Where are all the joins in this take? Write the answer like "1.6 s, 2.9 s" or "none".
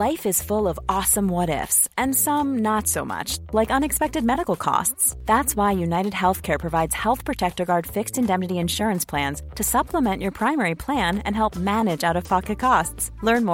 none